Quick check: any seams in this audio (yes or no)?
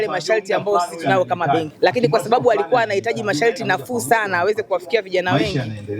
yes